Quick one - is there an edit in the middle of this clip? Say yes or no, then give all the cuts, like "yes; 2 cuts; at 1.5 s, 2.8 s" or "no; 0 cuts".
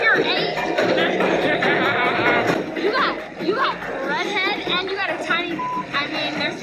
no; 0 cuts